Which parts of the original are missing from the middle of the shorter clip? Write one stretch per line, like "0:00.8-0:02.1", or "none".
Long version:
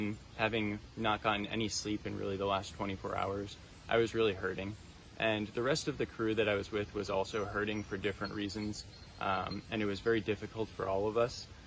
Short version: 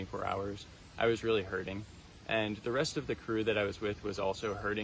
none